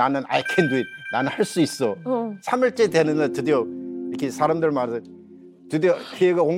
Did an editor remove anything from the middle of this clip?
no; 0 cuts

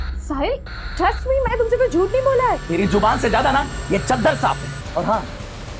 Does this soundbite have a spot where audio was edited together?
yes; 1 cut; at 4.7 s

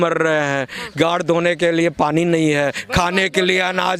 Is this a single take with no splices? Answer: yes; 0 cuts

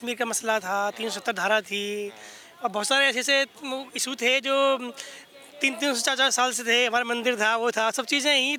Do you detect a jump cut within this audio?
no; 0 cuts

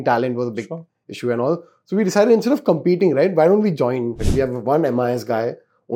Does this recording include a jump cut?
yes; 1 cut; at 4.2 s

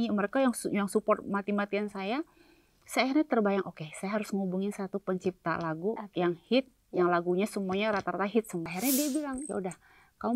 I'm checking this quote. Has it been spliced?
yes; 1 cut; at 8.7 s

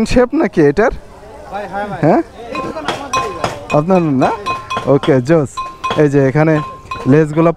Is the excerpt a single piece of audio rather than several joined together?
yes; 0 cuts

